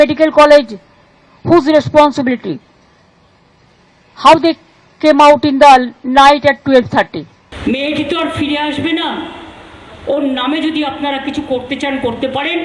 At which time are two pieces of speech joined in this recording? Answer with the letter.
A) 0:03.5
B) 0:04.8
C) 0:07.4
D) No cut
C